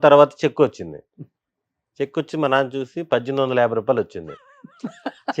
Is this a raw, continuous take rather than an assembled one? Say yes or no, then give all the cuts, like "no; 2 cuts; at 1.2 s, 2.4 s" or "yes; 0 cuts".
yes; 0 cuts